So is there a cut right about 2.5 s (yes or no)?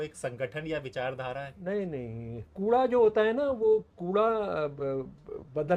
yes